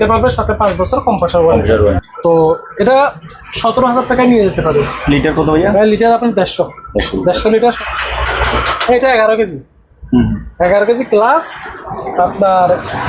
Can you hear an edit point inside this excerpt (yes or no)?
yes